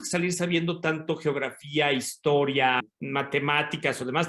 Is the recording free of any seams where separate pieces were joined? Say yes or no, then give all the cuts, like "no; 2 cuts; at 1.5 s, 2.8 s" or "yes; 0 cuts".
no; 1 cut; at 2.8 s